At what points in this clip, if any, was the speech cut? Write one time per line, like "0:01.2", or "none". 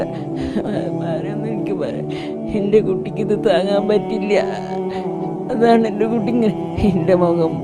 none

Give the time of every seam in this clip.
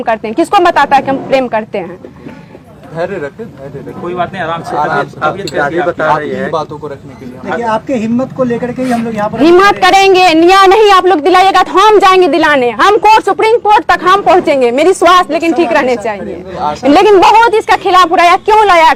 none

